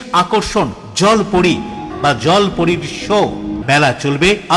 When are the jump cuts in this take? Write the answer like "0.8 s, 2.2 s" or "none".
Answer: 1.9 s, 3.6 s

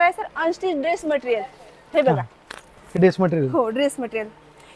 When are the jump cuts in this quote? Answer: none

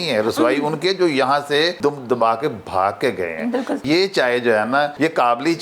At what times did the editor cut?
1.8 s, 3.8 s

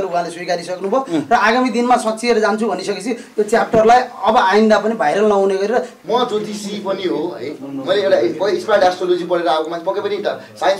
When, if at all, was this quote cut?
5.9 s

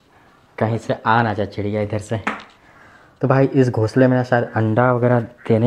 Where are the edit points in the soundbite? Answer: none

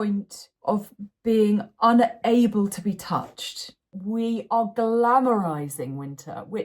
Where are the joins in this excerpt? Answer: 3.8 s

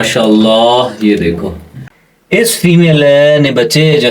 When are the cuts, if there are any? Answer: 1.7 s

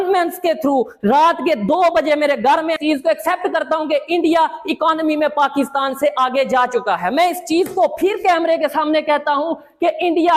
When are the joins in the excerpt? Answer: none

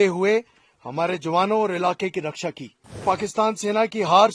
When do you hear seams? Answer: 3.0 s

